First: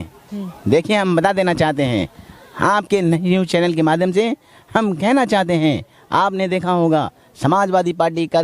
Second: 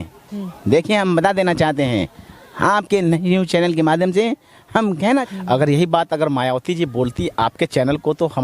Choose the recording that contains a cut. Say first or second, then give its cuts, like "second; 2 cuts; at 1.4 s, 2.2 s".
second; 1 cut; at 5.2 s